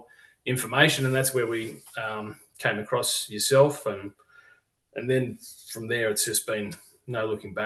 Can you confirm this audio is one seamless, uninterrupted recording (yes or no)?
yes